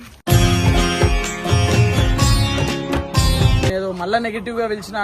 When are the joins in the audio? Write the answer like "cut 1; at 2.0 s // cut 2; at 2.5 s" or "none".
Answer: cut 1; at 3.7 s